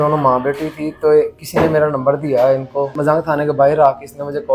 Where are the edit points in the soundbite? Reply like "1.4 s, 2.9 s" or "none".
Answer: 3.0 s